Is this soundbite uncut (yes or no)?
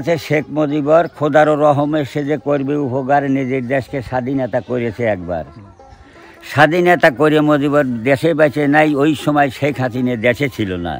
yes